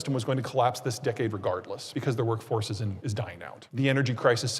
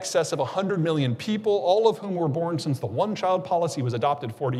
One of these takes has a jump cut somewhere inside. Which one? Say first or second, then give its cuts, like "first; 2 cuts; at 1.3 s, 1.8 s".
first; 2 cuts; at 1.8 s, 3.2 s